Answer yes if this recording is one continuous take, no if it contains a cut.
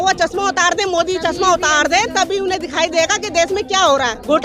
yes